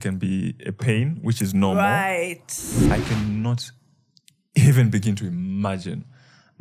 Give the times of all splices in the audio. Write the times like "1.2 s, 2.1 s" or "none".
2.8 s